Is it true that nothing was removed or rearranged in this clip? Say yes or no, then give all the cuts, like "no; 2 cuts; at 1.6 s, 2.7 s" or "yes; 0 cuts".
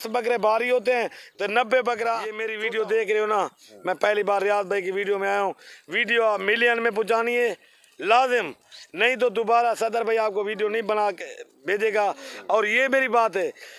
no; 1 cut; at 2.5 s